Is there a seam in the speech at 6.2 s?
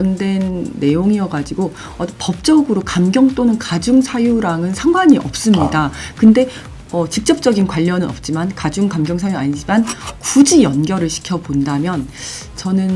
no; 0 cuts

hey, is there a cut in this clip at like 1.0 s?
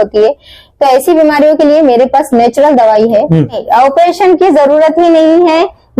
no; 1 cut; at 3.6 s

